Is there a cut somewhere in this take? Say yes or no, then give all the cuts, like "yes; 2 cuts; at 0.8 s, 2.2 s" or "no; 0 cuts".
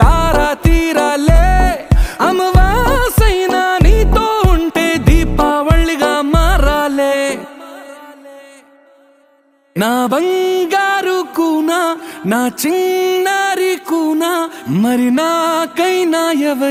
no; 0 cuts